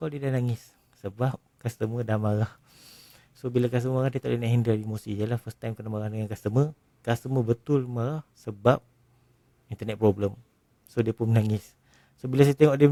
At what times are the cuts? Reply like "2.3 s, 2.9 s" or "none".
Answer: none